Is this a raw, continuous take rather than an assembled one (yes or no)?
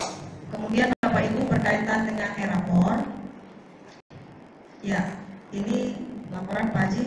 no